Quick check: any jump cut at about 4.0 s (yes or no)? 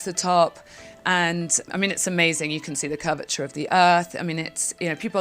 no